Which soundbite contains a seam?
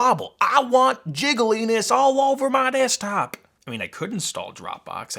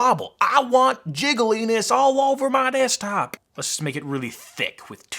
second; 1 cut; at 3.5 s

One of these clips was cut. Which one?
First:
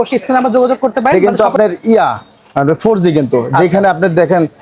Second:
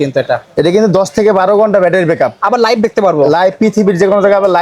first; 1 cut; at 1.1 s

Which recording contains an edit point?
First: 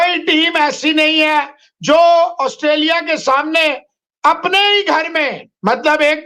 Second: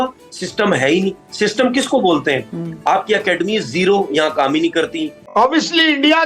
second; 1 cut; at 5.2 s

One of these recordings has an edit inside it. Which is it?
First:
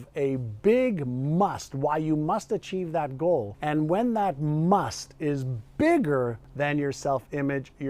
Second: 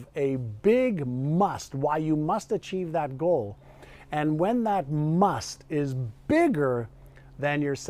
first; 2 cuts; at 3.5 s, 6.4 s

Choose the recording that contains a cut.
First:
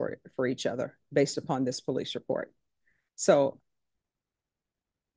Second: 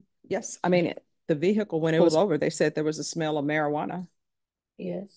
second; 1 cut; at 2.0 s

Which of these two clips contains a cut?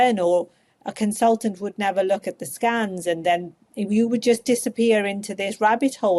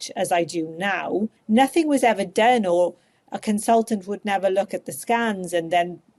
second; 1 cut; at 1.4 s

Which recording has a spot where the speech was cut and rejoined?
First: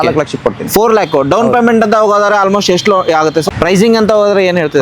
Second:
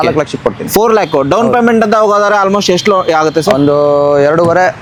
first; 1 cut; at 3.5 s

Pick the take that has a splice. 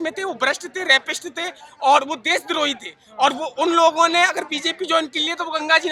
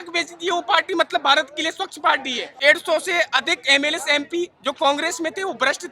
second; 1 cut; at 2.4 s

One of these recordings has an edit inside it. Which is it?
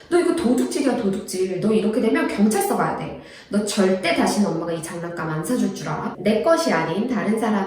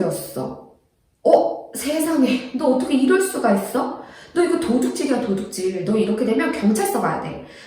first; 1 cut; at 6.2 s

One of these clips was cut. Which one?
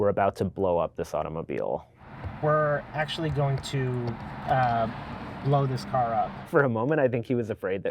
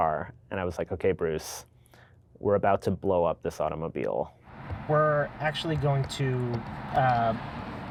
first; 1 cut; at 6.4 s

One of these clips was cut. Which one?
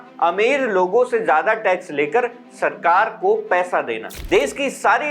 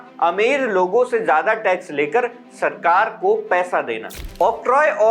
first; 1 cut; at 4.1 s

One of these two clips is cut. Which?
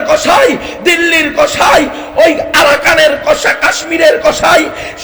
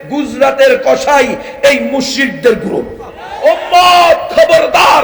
second; 1 cut; at 3.3 s

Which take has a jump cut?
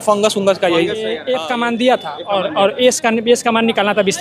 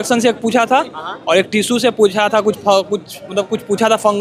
first; 1 cut; at 1.2 s

